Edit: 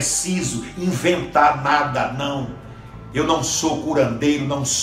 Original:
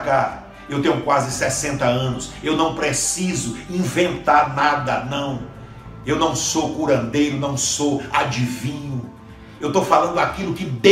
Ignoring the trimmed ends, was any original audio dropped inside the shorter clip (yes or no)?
no